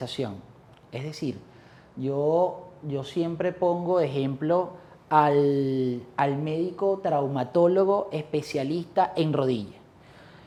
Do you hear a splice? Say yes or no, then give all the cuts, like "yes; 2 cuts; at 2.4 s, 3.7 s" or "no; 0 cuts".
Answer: no; 0 cuts